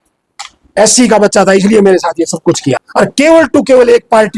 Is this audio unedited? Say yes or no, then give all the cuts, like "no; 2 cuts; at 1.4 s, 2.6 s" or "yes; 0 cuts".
no; 1 cut; at 2.8 s